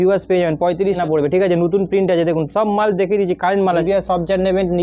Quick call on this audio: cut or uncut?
cut